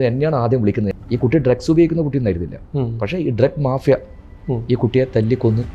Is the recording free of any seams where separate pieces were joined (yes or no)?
no